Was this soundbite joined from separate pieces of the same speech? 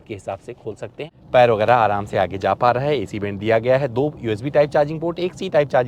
yes; 1 cut; at 1.1 s

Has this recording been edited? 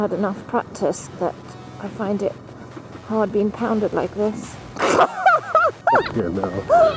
no; 0 cuts

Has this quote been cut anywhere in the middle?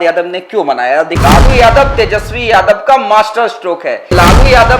yes; 2 cuts; at 1.1 s, 4.1 s

